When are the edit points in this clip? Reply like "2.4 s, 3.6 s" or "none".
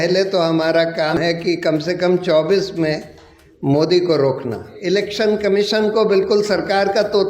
1.1 s, 4.7 s